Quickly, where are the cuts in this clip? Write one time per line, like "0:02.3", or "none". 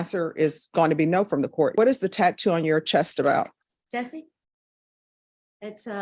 0:01.7